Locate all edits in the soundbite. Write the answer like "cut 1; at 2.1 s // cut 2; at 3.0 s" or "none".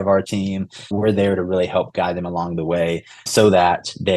cut 1; at 0.9 s // cut 2; at 3.2 s

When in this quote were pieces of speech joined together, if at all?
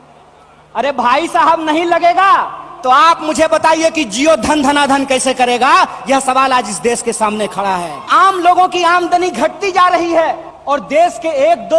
cut 1; at 8.1 s // cut 2; at 10.5 s

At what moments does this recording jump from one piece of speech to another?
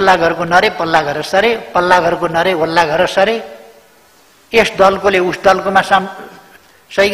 none

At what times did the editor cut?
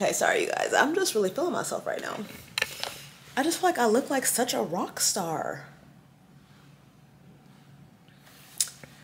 none

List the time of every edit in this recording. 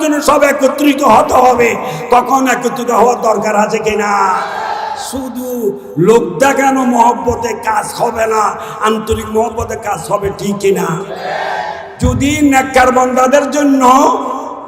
cut 1; at 11.9 s

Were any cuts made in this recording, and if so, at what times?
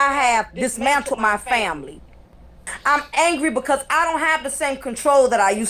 cut 1; at 2.7 s

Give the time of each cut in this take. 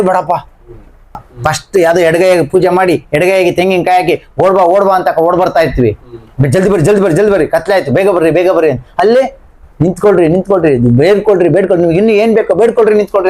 cut 1; at 1.2 s

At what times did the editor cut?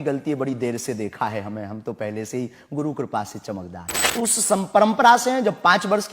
cut 1; at 4.1 s

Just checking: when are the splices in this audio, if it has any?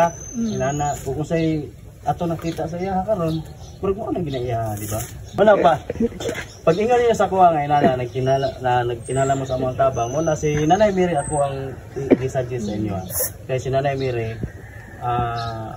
none

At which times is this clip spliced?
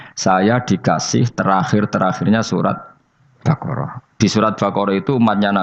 none

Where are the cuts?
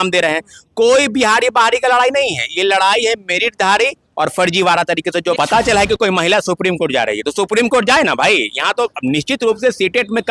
cut 1; at 5.4 s

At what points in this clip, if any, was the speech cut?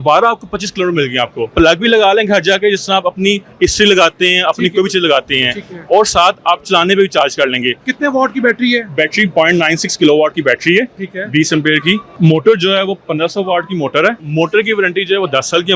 cut 1; at 1.5 s // cut 2; at 7.9 s // cut 3; at 12.1 s // cut 4; at 14.2 s

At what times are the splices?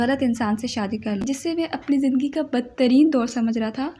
cut 1; at 1.2 s

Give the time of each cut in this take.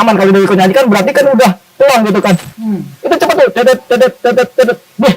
cut 1; at 2.5 s

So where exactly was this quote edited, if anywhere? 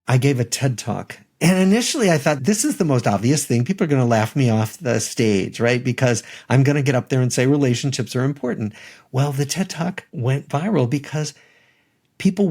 cut 1; at 1.4 s // cut 2; at 2.4 s // cut 3; at 10.1 s

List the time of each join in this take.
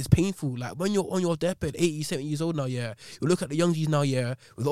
none

